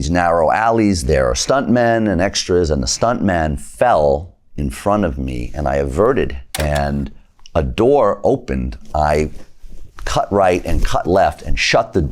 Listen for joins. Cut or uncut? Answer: cut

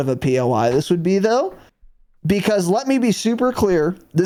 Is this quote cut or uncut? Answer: uncut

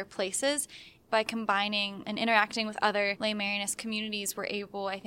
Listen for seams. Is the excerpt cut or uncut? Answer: cut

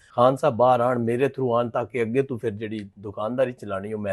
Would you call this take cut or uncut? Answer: uncut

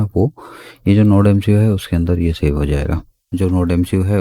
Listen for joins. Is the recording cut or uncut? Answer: cut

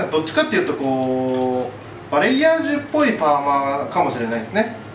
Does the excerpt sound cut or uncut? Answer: uncut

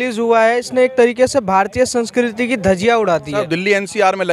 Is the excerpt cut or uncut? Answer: cut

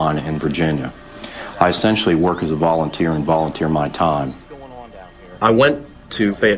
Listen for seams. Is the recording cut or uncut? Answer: uncut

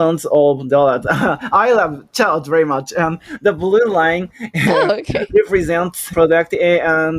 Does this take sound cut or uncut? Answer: cut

